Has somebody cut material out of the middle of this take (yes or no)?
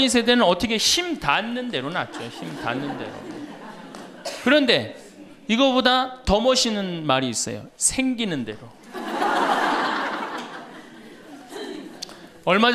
no